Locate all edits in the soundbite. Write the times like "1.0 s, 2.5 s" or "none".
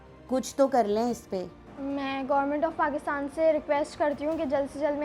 1.6 s